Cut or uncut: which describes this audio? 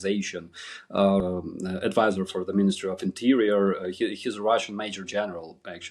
cut